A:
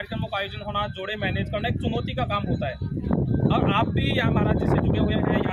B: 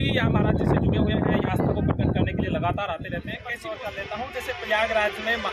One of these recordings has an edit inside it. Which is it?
B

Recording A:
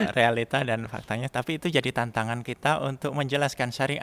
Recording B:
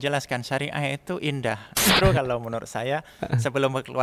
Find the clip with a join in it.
B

